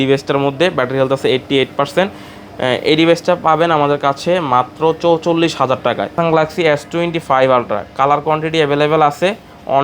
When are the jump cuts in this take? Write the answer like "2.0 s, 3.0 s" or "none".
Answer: 6.1 s